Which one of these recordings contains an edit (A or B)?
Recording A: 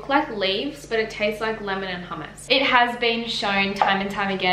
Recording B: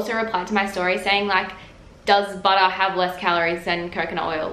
A